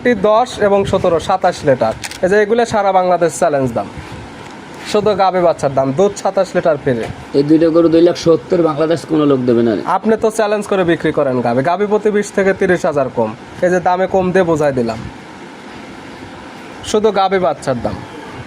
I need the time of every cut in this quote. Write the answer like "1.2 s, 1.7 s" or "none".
16.7 s